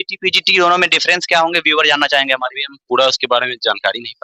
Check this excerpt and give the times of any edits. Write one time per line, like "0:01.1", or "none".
none